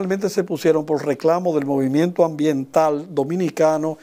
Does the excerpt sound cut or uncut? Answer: uncut